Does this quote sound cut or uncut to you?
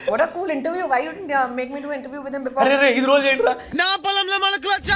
uncut